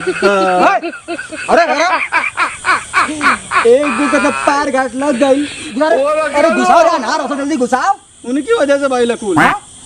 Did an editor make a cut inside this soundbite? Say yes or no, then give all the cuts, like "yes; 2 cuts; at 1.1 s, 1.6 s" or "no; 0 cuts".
no; 0 cuts